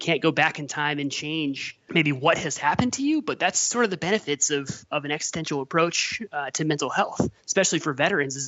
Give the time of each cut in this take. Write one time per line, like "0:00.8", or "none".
0:01.7

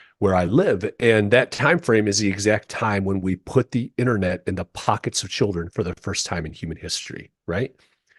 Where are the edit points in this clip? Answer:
0:06.0

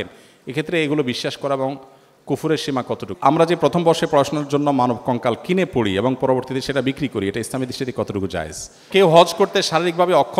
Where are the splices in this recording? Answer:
0:03.1
0:08.8

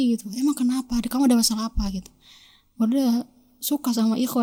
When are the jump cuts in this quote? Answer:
none

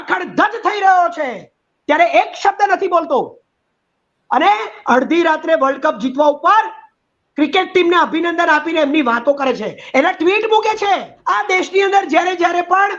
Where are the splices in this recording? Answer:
0:11.1

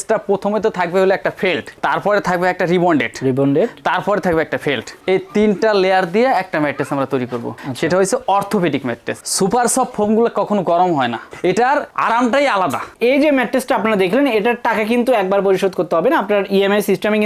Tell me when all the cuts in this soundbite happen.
0:09.2
0:12.9

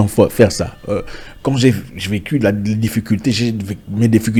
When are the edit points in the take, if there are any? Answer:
none

